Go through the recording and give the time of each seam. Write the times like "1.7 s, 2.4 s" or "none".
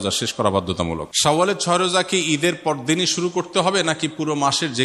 1.1 s